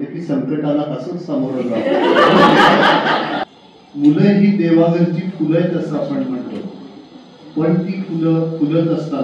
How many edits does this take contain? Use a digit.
1